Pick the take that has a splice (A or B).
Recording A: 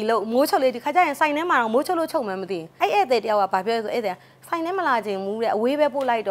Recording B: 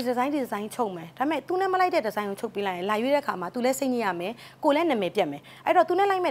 A